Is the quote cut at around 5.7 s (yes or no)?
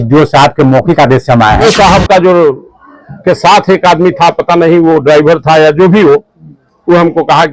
no